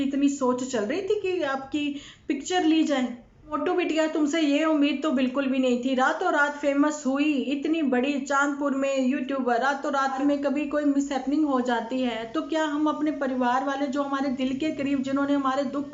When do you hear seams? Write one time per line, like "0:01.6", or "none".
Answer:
0:03.6
0:10.2